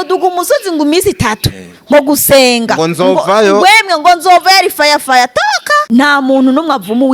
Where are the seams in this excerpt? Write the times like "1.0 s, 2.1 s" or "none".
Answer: 5.8 s